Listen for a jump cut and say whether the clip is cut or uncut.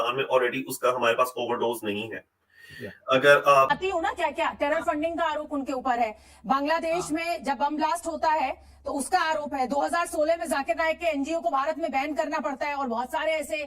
cut